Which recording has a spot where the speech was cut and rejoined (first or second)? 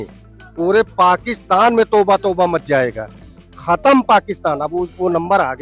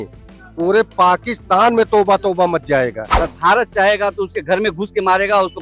second